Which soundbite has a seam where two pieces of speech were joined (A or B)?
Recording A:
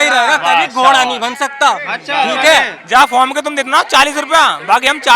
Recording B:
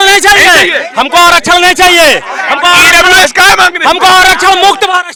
A